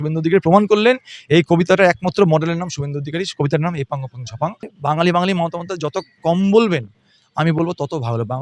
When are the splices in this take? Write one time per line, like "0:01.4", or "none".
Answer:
0:04.7